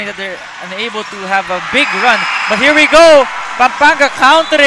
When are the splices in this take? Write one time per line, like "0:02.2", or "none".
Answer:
none